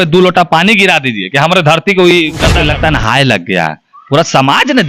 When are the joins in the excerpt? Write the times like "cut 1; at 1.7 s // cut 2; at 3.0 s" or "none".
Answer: cut 1; at 2.6 s